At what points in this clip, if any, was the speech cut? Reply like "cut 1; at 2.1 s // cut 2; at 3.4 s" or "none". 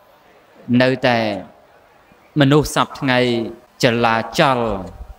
cut 1; at 3.6 s

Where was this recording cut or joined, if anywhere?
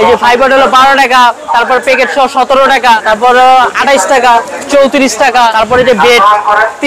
cut 1; at 3.0 s // cut 2; at 4.5 s // cut 3; at 5.5 s

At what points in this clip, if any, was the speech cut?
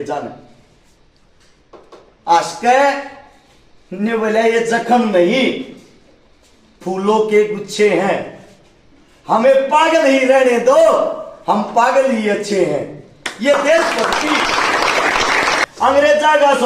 cut 1; at 15.6 s

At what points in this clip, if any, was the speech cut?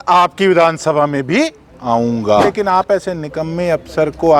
cut 1; at 2.5 s

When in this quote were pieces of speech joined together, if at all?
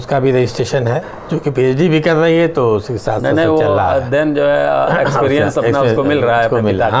none

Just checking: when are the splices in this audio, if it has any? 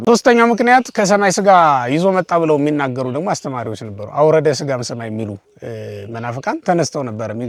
none

